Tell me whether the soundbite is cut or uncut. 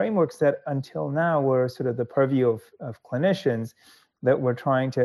uncut